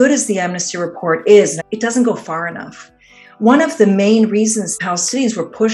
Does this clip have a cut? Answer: yes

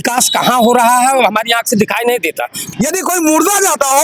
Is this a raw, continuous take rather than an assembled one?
no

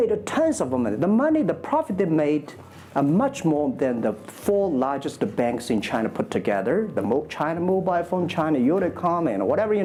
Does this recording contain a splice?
no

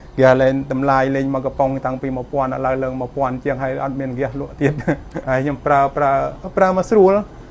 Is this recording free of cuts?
no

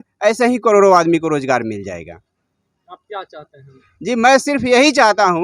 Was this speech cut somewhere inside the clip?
no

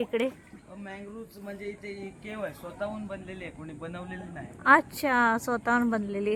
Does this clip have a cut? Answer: no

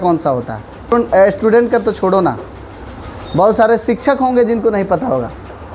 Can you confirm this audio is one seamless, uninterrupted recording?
no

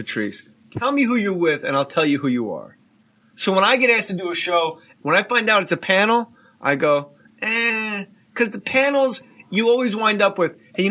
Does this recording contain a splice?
no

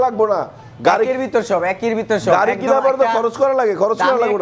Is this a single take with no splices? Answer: yes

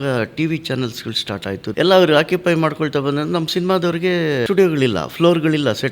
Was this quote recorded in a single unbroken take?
no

